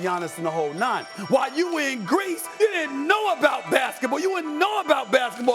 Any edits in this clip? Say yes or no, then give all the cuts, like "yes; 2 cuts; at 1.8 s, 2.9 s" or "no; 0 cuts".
yes; 2 cuts; at 1.1 s, 2.4 s